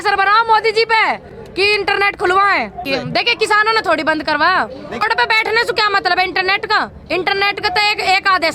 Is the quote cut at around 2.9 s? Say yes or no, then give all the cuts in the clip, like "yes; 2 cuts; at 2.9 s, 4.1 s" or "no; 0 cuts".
yes; 2 cuts; at 2.9 s, 5.1 s